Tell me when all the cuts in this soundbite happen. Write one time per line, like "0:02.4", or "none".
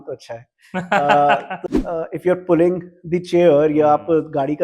0:01.5